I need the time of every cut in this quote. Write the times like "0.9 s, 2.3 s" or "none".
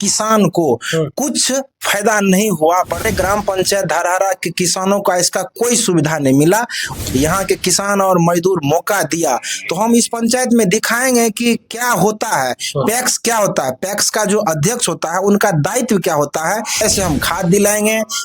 3.1 s, 6.8 s, 16.8 s